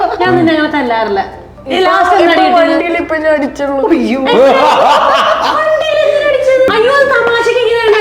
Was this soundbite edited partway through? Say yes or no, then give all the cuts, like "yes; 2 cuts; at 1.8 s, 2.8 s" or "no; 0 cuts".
yes; 1 cut; at 6.7 s